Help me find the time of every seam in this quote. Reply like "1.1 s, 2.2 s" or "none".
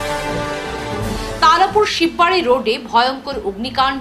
1.0 s